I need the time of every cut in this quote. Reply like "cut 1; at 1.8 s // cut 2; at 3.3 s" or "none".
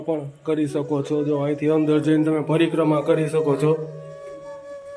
cut 1; at 3.9 s

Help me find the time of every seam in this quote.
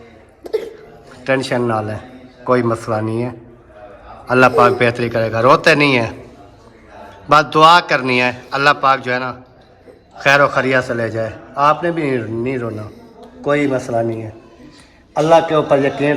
none

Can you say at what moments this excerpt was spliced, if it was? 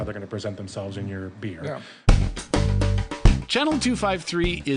cut 1; at 1.9 s

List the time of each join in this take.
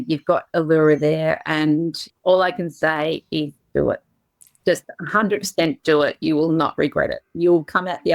cut 1; at 2.0 s

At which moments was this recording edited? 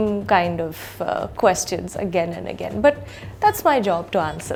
none

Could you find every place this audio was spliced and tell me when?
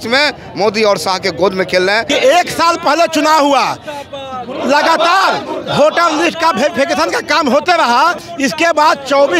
cut 1; at 2.0 s // cut 2; at 8.2 s

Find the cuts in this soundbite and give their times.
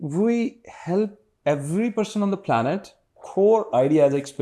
cut 1; at 3.2 s

